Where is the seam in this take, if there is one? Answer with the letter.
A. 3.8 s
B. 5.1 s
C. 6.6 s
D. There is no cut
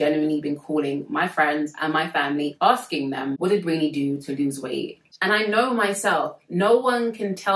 B